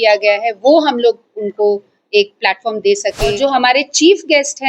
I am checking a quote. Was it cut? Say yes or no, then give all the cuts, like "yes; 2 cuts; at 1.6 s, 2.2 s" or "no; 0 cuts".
yes; 1 cut; at 3.4 s